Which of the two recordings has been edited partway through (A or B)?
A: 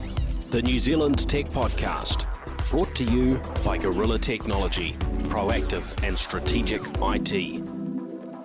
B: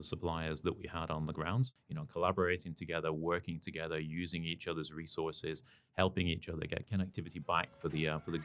B